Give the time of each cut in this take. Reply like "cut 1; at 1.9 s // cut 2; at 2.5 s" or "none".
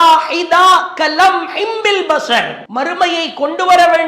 cut 1; at 2.6 s